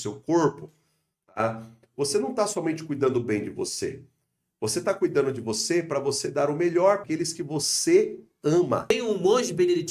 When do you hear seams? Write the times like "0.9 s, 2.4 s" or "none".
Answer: 7.0 s, 8.9 s